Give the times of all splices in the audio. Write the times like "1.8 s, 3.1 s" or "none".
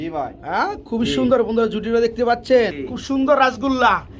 2.7 s